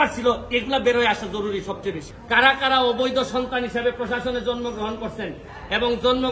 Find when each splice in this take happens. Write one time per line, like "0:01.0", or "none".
0:02.1